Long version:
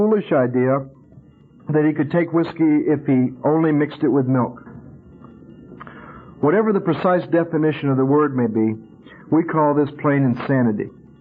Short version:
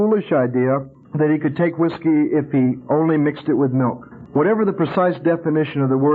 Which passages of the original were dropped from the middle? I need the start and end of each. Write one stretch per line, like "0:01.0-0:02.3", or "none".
0:01.0-0:01.5
0:04.7-0:06.2